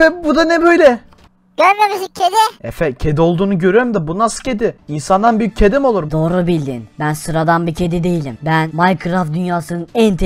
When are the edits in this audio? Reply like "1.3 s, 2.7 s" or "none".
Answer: 1.2 s, 2.6 s, 4.9 s, 6.1 s, 6.8 s, 8.7 s